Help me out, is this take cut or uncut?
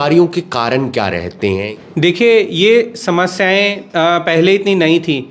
cut